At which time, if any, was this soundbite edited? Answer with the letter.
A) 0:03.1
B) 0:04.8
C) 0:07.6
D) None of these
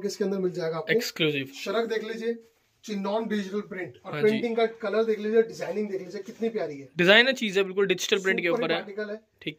D